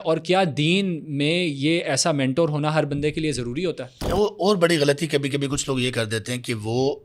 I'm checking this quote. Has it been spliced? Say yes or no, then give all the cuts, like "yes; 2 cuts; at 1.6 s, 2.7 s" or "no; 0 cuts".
yes; 1 cut; at 4.0 s